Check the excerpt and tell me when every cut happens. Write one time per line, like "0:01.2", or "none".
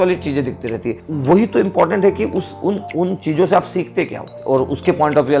0:01.0
0:04.3